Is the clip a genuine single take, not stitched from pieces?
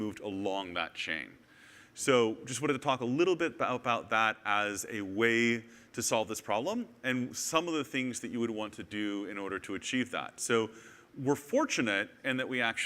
no; 1 cut; at 7.7 s

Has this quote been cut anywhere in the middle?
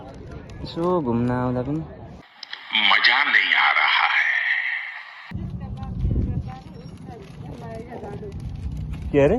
yes; 1 cut; at 5.3 s

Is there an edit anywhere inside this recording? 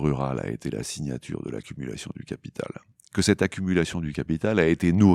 no; 0 cuts

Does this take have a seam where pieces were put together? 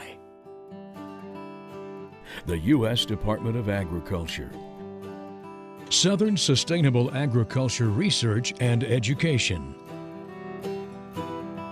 yes; 1 cut; at 9.7 s

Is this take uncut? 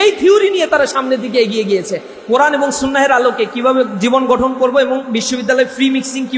no; 1 cut; at 2.0 s

